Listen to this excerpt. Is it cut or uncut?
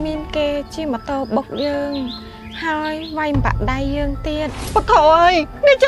cut